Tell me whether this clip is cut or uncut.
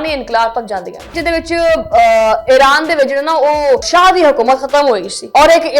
cut